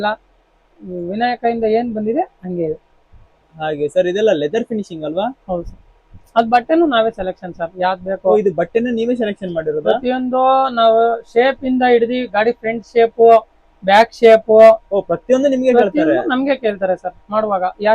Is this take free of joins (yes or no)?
yes